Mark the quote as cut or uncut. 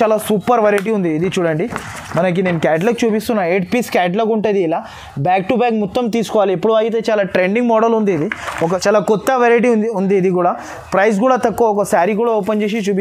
cut